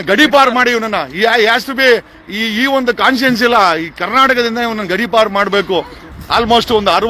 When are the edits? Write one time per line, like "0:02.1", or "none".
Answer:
0:06.0